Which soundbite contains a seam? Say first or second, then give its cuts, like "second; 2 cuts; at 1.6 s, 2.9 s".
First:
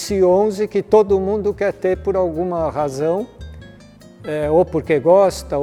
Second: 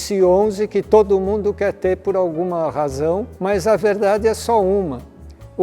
second; 1 cut; at 3.3 s